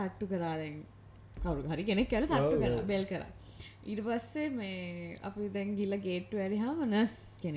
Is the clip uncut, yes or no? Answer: yes